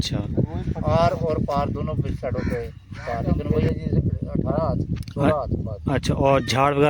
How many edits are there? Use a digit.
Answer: 1